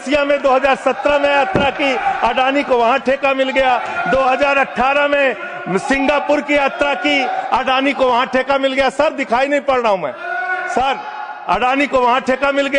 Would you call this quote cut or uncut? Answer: uncut